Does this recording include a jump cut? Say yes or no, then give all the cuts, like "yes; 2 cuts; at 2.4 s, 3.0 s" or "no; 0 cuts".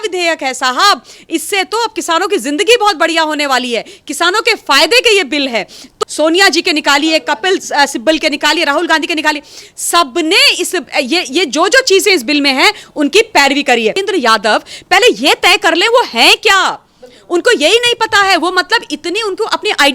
yes; 2 cuts; at 5.9 s, 14.0 s